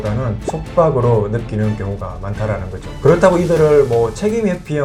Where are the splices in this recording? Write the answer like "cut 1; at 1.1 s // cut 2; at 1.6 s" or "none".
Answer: none